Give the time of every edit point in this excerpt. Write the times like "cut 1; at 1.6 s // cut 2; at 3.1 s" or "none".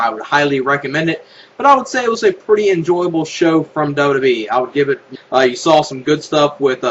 none